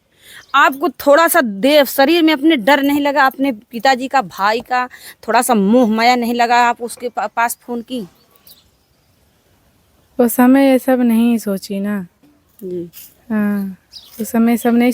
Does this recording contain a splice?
no; 0 cuts

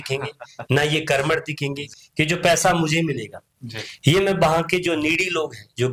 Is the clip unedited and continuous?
no; 1 cut; at 1.9 s

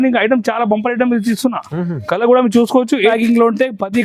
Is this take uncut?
no; 1 cut; at 3.1 s

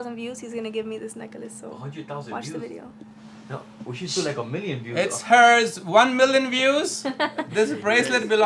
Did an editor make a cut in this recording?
no; 0 cuts

